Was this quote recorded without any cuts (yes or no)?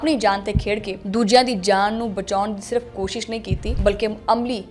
no